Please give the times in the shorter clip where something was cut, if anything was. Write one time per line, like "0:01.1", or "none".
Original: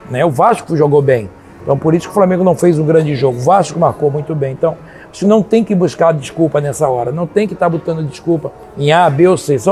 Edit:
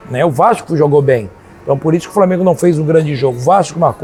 none